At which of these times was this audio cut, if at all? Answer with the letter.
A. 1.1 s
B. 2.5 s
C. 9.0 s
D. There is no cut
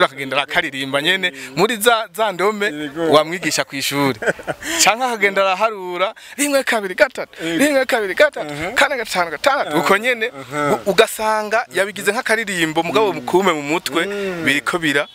D